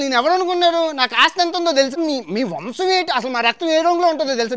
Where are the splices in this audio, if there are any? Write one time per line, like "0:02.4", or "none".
0:01.9